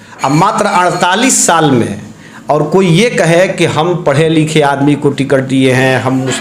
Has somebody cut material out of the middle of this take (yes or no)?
no